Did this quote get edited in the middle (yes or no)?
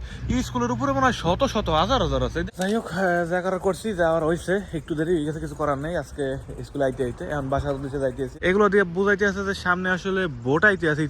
yes